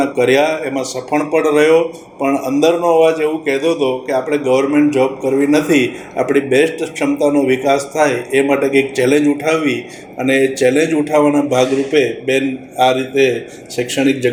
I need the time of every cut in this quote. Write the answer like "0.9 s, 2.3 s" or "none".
none